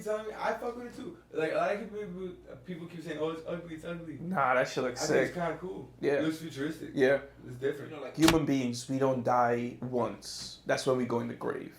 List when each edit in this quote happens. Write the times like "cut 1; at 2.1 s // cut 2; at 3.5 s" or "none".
cut 1; at 8.1 s